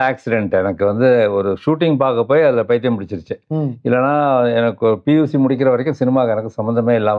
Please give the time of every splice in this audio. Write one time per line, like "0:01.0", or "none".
none